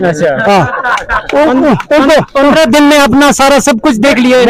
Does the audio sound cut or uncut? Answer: uncut